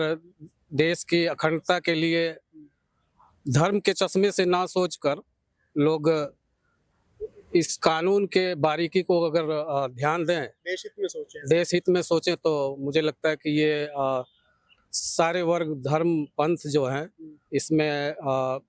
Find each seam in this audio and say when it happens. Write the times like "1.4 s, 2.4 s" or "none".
none